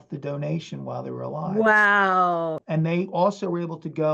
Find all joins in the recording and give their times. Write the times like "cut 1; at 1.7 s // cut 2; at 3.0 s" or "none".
cut 1; at 2.6 s